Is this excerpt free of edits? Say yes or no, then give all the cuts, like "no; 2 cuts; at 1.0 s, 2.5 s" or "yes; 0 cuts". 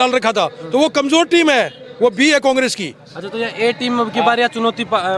yes; 0 cuts